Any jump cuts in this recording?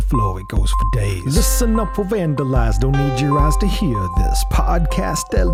no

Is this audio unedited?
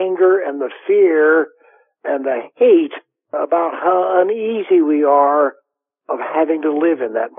yes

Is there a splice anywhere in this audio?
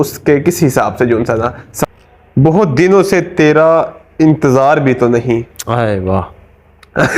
yes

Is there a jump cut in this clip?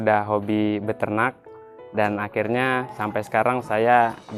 no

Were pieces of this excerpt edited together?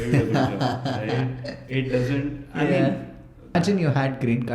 yes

